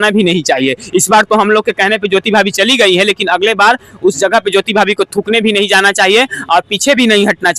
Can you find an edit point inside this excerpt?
no; 0 cuts

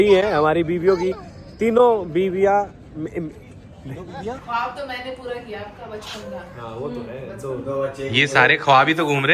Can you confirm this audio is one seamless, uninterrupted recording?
no; 1 cut; at 4.4 s

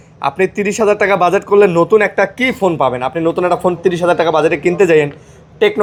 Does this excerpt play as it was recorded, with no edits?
yes; 0 cuts

